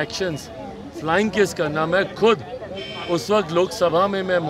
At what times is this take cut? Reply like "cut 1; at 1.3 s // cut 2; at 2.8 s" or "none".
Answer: none